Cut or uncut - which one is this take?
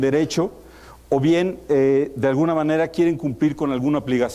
uncut